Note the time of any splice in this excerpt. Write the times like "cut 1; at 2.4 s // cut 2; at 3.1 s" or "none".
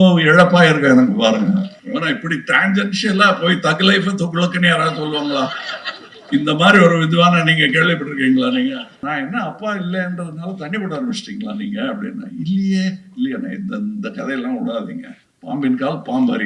cut 1; at 1.8 s // cut 2; at 8.9 s